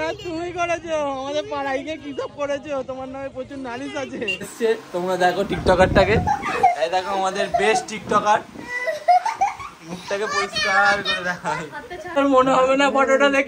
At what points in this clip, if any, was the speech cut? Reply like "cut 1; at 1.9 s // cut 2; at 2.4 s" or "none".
cut 1; at 4.5 s // cut 2; at 12.2 s